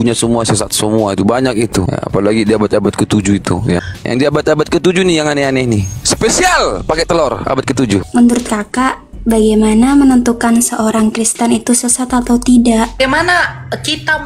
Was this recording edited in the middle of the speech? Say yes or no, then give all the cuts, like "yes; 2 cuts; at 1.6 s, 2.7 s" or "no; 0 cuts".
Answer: yes; 5 cuts; at 1.9 s, 3.9 s, 5.9 s, 8.0 s, 12.9 s